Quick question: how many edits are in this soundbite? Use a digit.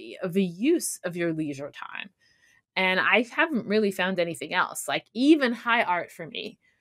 0